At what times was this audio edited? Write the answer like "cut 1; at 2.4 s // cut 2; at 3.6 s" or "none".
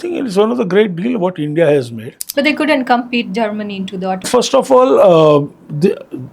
cut 1; at 2.2 s // cut 2; at 4.2 s